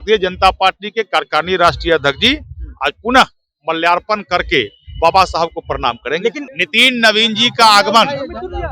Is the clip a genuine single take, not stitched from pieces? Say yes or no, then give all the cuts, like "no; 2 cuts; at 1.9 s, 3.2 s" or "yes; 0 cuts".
no; 1 cut; at 6.4 s